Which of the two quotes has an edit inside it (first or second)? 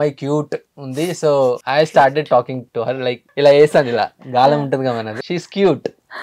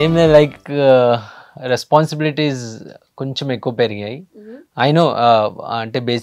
first